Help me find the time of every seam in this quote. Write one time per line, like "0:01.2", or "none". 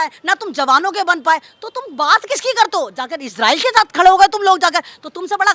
none